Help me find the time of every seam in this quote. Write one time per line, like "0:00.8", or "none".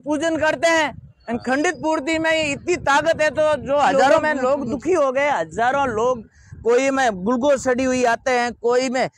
0:04.2